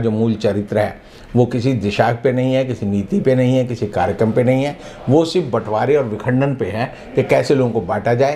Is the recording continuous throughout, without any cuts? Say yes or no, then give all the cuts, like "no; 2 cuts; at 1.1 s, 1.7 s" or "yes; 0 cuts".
yes; 0 cuts